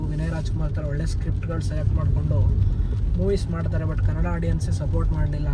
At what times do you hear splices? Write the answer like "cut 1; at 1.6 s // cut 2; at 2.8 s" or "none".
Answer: none